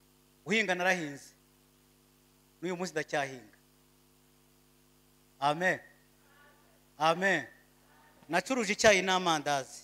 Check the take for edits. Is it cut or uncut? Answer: uncut